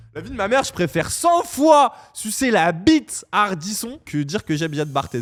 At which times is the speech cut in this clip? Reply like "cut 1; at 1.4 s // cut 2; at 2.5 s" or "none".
none